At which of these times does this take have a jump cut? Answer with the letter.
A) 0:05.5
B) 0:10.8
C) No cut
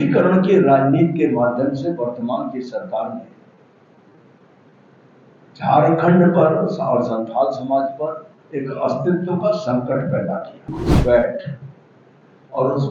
B